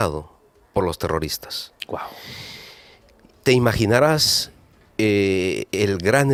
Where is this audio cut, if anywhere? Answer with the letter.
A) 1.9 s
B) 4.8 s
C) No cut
C